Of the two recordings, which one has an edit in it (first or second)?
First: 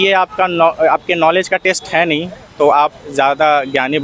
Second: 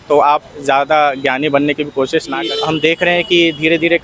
second